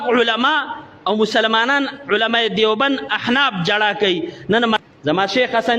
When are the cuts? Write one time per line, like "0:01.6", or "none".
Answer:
0:04.8